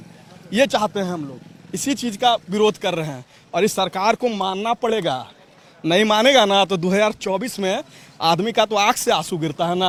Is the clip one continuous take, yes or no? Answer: yes